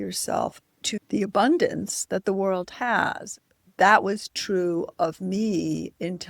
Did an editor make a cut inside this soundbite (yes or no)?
yes